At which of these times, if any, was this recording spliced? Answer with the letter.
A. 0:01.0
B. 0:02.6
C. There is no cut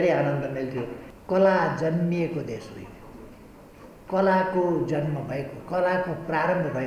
A